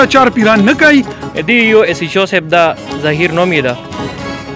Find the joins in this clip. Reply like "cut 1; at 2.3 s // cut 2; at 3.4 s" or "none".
cut 1; at 1.2 s